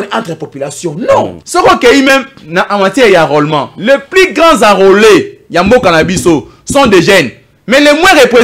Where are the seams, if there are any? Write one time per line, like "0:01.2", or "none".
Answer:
0:01.4